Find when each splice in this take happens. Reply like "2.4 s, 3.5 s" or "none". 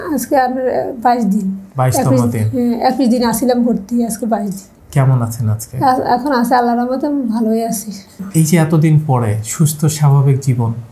none